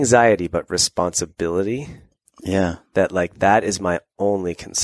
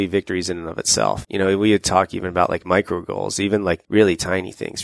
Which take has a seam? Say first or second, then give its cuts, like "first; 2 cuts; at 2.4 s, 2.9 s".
second; 2 cuts; at 1.2 s, 3.8 s